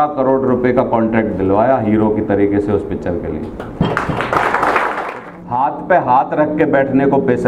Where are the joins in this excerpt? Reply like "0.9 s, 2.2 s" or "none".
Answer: 5.1 s